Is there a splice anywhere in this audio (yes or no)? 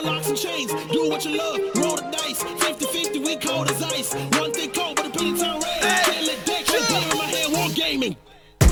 no